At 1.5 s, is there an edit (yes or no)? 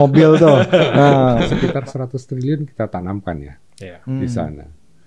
yes